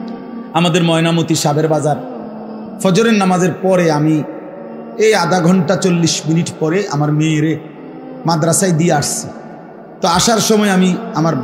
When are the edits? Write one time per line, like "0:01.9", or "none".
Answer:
none